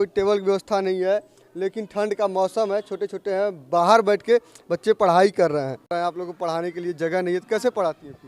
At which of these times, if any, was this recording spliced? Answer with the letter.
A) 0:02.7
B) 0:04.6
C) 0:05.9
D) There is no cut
C